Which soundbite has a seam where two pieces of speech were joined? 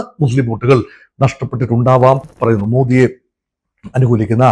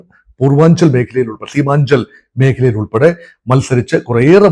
first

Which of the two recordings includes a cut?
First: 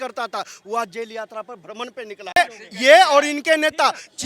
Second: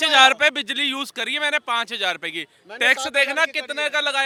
first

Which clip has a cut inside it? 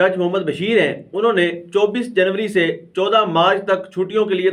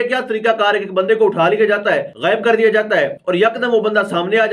second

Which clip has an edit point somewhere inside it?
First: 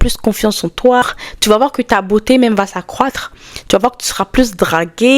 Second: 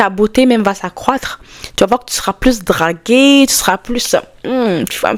first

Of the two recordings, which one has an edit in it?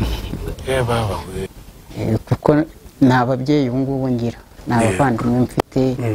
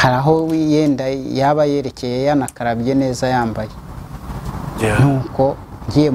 first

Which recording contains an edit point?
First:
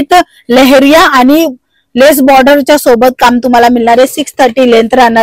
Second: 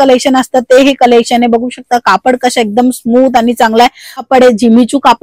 second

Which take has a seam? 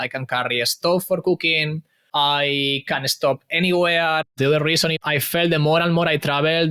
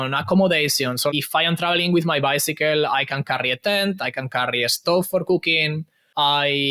first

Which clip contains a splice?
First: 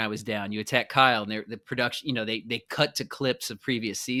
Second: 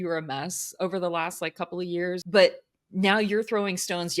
second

